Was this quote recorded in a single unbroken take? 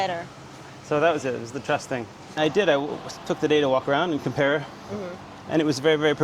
no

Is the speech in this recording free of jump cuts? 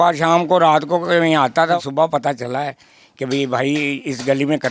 no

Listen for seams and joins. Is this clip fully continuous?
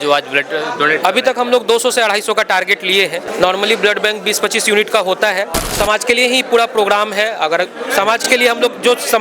no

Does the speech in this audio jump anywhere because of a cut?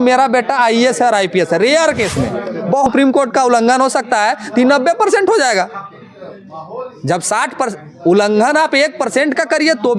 yes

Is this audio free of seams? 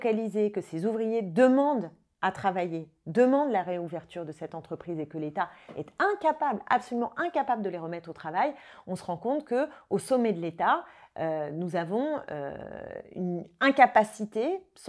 yes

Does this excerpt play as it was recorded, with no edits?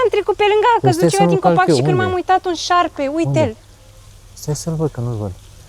yes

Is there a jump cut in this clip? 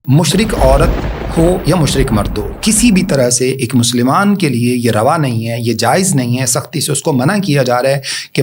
no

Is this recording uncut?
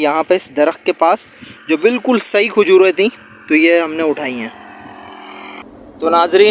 yes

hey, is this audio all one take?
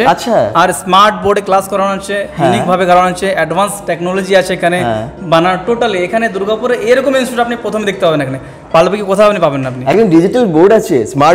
yes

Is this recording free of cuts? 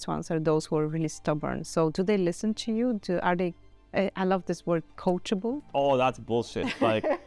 no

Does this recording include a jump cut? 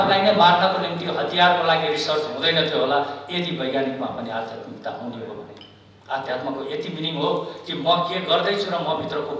no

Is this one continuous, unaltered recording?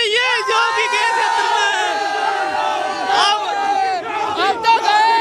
yes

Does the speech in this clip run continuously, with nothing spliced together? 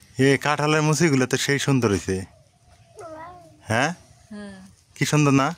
yes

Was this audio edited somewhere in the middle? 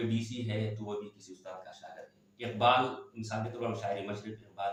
no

